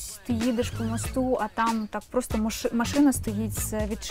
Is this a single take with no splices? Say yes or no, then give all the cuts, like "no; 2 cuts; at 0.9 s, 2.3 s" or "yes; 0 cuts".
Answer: yes; 0 cuts